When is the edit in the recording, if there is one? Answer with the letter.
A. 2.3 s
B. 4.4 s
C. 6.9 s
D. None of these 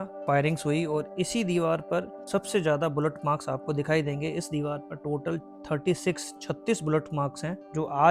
D